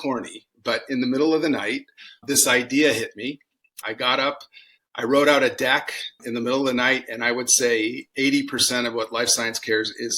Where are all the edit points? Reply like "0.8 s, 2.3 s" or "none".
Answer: 3.7 s

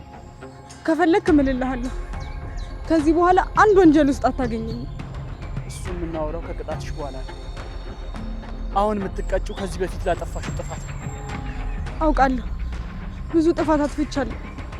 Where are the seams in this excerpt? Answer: none

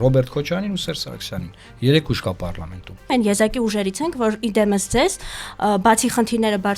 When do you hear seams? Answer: 3.1 s

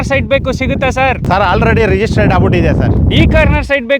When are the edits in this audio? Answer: 1.2 s

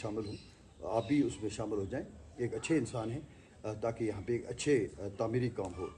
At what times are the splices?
none

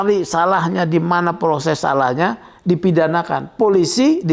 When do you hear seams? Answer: none

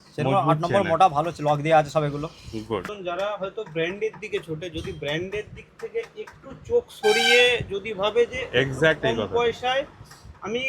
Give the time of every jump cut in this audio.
2.9 s

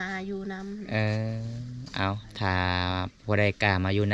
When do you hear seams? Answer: none

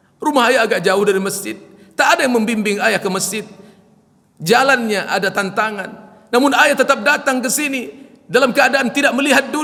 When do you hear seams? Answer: none

